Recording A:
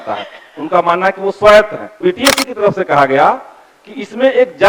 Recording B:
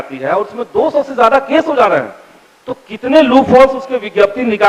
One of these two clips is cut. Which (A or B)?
A